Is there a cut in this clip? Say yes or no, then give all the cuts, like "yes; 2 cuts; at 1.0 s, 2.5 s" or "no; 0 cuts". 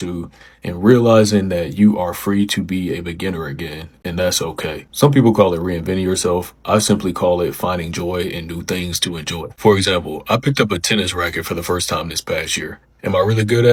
no; 0 cuts